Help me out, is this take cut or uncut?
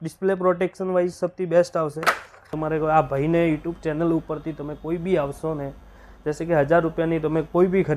cut